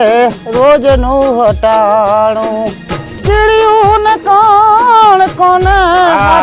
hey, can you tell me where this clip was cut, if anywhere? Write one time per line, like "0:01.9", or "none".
none